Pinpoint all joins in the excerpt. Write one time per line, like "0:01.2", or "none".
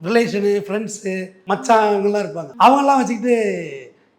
0:01.3
0:02.4